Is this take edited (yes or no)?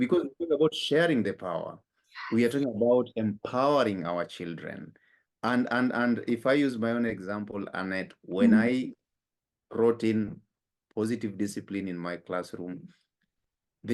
no